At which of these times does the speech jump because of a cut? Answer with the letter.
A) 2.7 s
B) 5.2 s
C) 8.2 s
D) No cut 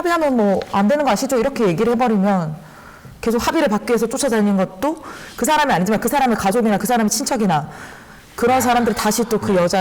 D